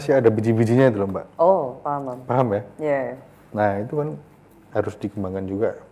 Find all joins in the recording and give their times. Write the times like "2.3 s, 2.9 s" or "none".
none